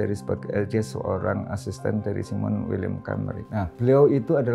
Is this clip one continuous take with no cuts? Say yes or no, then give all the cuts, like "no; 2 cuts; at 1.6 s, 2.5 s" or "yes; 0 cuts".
yes; 0 cuts